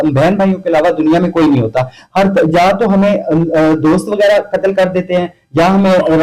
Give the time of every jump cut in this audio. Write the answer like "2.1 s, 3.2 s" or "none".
none

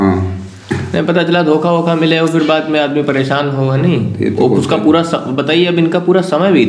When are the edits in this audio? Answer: none

